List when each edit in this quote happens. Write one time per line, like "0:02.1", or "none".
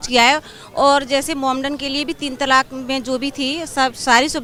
none